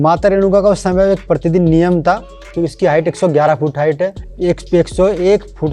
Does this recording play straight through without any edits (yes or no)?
no